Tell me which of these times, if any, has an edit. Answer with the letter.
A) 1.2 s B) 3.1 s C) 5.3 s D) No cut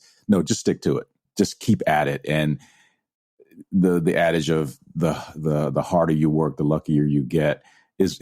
A